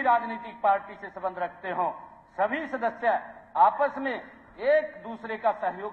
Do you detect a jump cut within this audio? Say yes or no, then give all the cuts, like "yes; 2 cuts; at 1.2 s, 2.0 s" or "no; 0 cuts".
no; 0 cuts